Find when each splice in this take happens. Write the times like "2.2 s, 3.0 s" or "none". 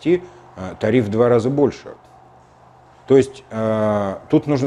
none